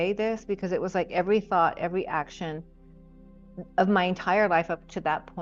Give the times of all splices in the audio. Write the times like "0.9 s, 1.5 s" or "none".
none